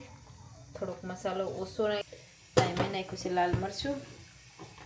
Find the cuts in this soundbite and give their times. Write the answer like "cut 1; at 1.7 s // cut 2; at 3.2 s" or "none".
cut 1; at 2.1 s